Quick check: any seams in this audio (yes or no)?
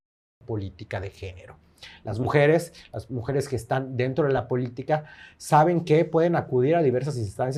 no